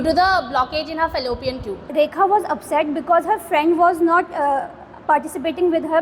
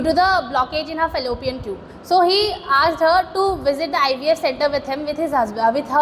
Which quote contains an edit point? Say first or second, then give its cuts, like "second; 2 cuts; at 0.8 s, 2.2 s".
first; 1 cut; at 1.9 s